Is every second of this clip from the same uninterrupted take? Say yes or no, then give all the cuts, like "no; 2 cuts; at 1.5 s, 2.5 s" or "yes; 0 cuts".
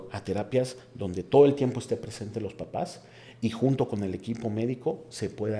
yes; 0 cuts